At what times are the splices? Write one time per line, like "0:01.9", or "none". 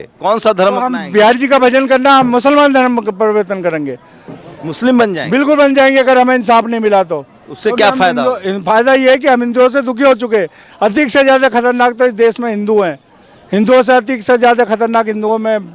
none